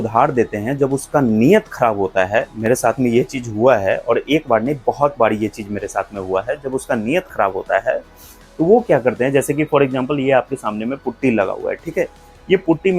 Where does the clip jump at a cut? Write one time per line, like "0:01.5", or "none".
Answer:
none

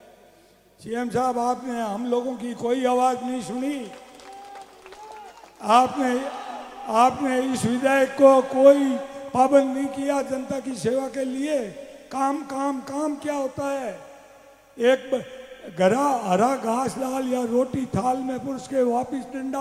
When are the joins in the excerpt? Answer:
none

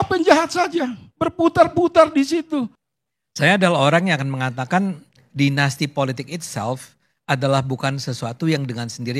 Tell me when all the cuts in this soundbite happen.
0:02.8

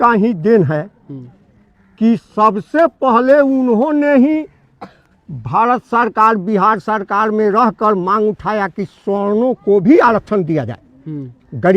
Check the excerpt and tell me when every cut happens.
none

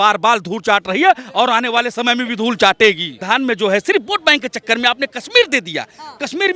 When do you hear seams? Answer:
0:03.2

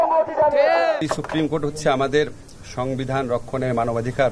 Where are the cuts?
0:01.0

